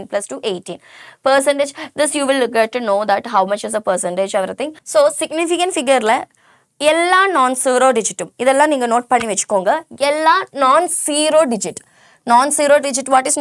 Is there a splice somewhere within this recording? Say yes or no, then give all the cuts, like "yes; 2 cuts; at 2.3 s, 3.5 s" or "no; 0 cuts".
yes; 1 cut; at 4.7 s